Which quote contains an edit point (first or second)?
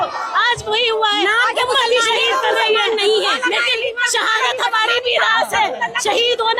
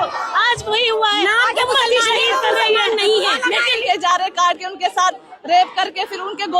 second